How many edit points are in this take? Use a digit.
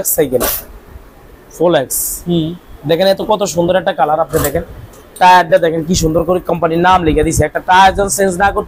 0